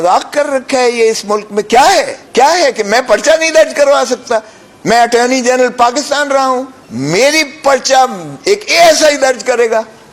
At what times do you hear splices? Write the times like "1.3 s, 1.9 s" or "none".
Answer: 2.2 s, 6.8 s